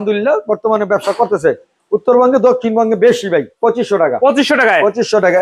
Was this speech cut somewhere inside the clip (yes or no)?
yes